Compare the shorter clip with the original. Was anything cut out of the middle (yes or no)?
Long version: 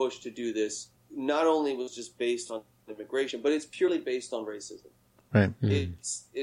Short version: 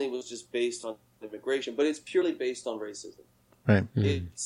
no